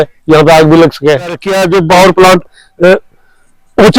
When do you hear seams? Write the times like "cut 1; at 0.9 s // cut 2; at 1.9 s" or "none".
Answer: cut 1; at 1.5 s